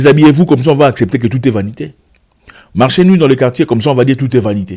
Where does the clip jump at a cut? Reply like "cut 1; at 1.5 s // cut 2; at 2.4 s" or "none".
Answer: none